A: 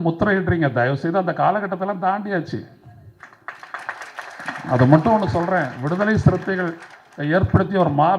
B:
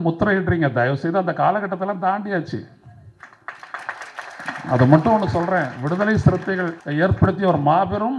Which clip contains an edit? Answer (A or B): B